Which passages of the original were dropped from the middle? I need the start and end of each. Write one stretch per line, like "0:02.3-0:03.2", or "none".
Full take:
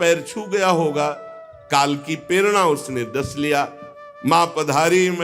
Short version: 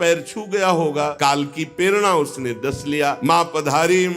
0:01.1-0:01.7
0:03.7-0:04.2